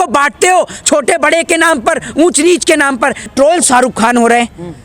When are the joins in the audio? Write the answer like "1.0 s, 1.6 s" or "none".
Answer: 3.3 s